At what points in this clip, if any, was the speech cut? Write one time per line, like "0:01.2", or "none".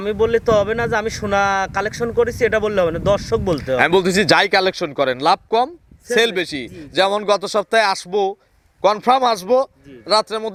none